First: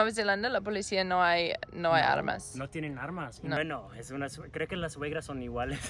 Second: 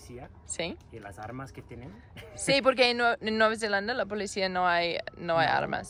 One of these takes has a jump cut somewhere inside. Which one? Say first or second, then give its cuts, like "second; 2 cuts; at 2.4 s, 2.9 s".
first; 1 cut; at 3.6 s